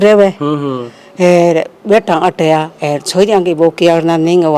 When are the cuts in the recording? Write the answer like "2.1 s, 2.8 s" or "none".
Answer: none